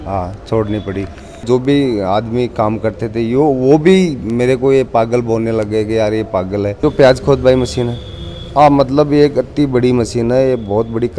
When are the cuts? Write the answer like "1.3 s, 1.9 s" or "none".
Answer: 1.4 s, 6.8 s